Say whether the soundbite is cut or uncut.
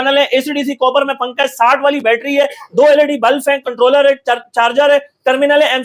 uncut